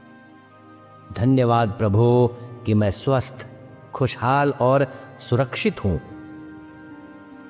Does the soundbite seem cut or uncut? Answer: cut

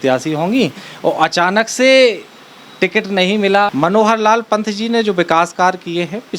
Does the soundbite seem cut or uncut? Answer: cut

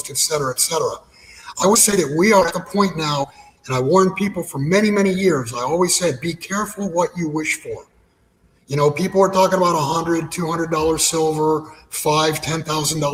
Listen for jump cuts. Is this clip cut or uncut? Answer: uncut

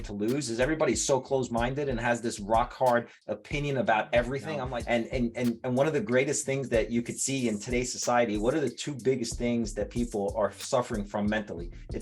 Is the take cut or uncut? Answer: cut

